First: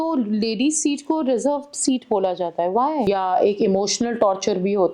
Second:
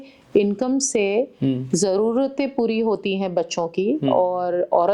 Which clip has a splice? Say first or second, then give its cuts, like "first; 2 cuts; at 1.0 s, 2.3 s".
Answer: first; 1 cut; at 3.1 s